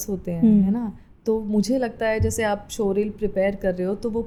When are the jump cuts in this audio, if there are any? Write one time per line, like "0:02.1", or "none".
none